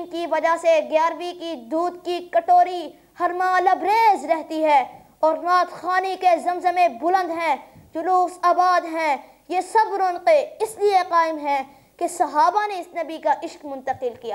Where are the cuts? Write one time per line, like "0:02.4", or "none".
none

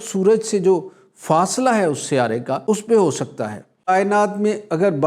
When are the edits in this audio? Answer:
0:02.5
0:03.9

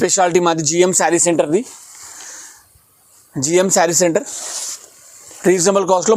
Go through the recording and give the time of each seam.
none

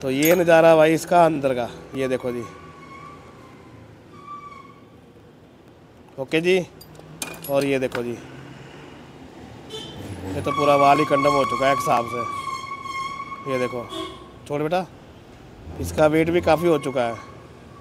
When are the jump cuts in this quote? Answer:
none

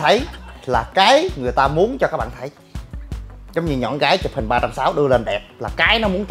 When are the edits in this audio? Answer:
none

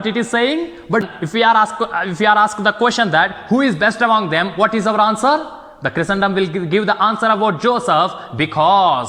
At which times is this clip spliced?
0:01.1

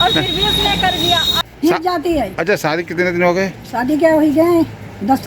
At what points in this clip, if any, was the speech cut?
0:01.4

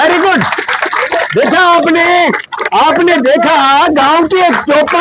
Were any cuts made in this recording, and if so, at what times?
none

